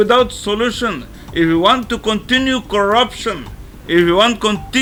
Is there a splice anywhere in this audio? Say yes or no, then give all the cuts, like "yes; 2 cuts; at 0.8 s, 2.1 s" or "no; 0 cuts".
no; 0 cuts